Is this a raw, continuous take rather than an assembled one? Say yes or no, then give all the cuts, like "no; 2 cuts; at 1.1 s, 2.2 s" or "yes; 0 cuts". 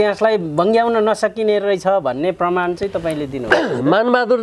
yes; 0 cuts